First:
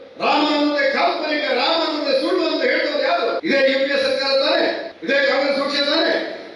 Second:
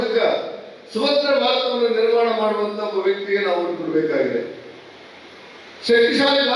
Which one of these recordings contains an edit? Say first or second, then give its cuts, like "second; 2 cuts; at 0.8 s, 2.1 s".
first; 2 cuts; at 3.4 s, 4.9 s